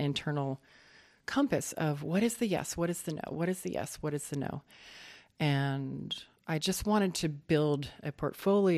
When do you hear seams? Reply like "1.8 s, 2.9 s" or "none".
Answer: 6.6 s